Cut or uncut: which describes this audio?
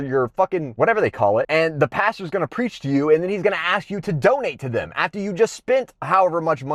uncut